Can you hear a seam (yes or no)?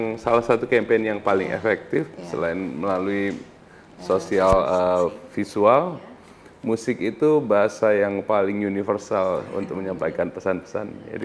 no